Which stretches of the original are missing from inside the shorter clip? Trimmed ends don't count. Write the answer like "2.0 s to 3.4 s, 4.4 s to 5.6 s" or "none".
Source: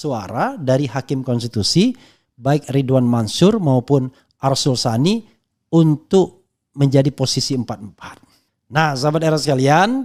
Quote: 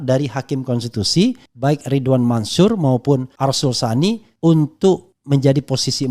2.1 s to 2.3 s, 4.1 s to 4.3 s, 5.3 s to 5.6 s, 6.4 s to 6.6 s